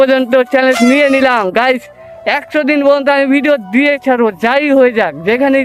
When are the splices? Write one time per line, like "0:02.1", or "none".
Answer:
none